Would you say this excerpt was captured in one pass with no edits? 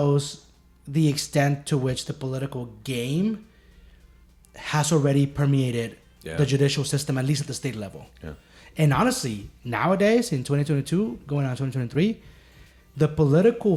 yes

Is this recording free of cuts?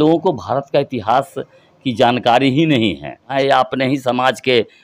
no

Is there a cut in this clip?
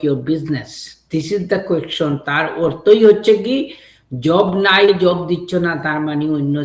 yes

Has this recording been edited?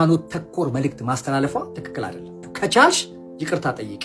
yes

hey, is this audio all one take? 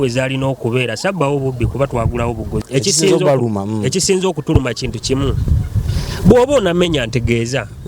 no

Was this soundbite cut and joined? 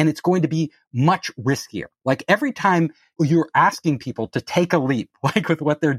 yes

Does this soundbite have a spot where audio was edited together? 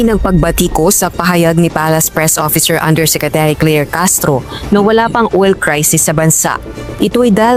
no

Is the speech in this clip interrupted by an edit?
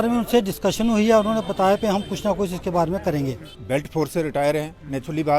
yes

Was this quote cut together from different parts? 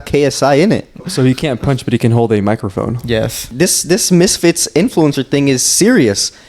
yes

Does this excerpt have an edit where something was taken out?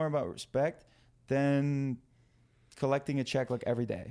no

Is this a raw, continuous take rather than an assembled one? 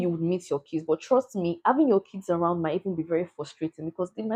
yes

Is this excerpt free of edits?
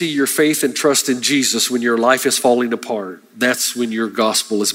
yes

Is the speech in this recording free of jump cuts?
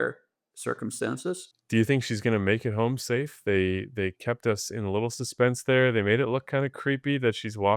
no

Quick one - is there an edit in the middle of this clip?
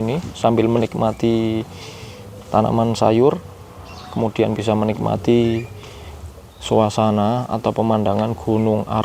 no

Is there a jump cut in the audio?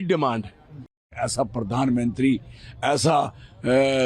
yes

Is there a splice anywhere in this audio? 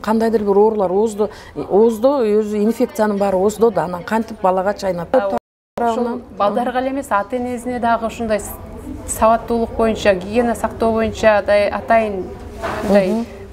no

